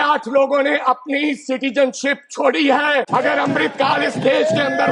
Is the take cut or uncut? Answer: cut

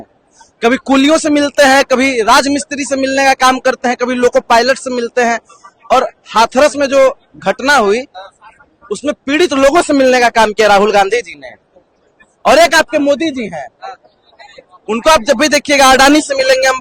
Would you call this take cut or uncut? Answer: uncut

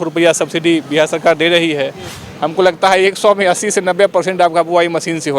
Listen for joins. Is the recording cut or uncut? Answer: cut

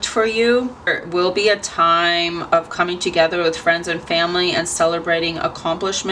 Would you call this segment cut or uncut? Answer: uncut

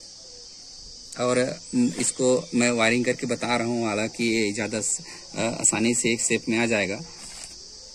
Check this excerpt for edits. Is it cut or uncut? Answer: uncut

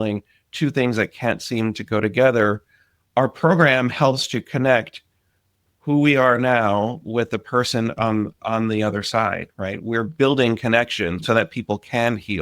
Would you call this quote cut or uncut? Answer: cut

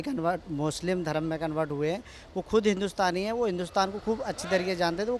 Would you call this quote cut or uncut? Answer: uncut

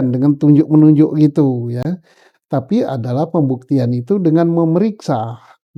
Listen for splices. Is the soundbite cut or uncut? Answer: uncut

